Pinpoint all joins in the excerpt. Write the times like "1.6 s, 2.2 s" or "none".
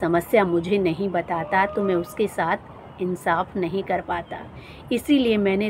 none